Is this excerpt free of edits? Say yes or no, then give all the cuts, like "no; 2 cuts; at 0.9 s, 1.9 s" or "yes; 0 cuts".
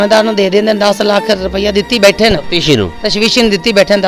yes; 0 cuts